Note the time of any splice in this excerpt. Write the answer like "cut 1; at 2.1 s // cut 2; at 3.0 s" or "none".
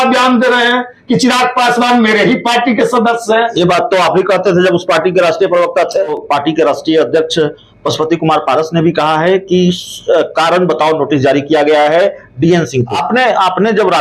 cut 1; at 6.1 s // cut 2; at 13.0 s